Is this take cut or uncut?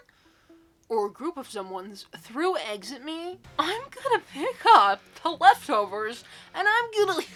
uncut